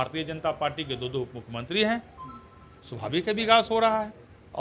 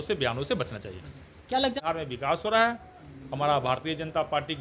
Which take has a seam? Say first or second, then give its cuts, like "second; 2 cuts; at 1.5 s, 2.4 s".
second; 1 cut; at 1.8 s